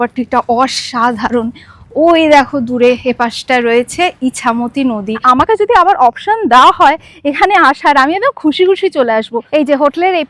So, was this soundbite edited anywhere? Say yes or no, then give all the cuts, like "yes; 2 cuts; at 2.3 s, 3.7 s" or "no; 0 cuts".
yes; 2 cuts; at 5.2 s, 9.4 s